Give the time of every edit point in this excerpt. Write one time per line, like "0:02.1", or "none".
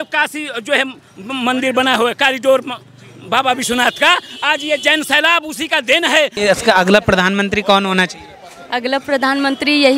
0:06.3